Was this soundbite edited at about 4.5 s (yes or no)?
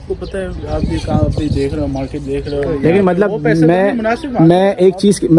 no